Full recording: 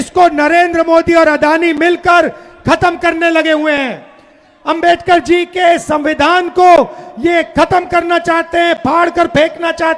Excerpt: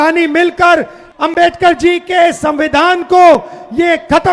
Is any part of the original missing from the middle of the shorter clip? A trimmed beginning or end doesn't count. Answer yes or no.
yes